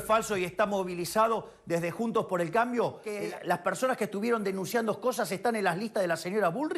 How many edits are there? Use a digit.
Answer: 1